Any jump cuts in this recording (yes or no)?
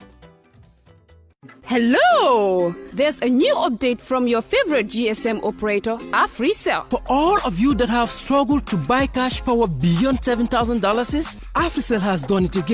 yes